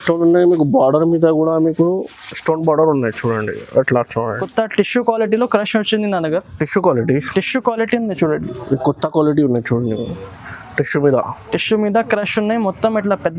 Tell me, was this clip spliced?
yes; 1 cut; at 4.4 s

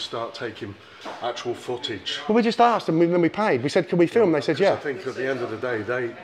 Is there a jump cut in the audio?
no; 0 cuts

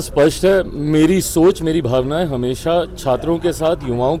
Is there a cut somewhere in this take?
no; 0 cuts

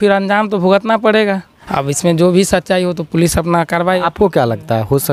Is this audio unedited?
no; 1 cut; at 1.5 s

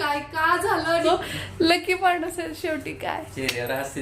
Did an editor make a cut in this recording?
yes; 1 cut; at 1.0 s

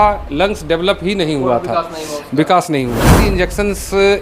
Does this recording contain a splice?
yes; 1 cut; at 3.1 s

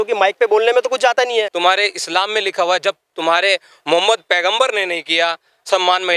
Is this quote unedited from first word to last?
no; 1 cut; at 1.2 s

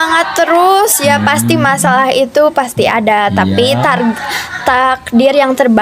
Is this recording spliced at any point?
no; 0 cuts

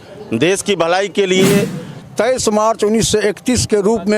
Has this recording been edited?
yes; 1 cut; at 2.0 s

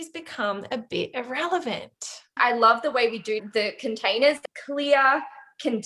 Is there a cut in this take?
yes; 3 cuts; at 2.3 s, 3.4 s, 4.4 s

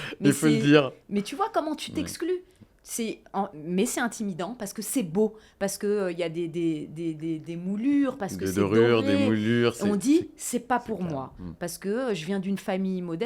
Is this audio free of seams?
yes; 0 cuts

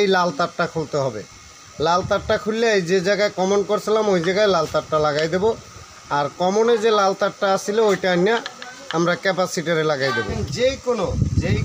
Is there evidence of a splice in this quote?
yes; 1 cut; at 10.4 s

